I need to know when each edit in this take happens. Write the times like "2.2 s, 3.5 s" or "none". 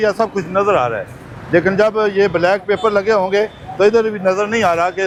none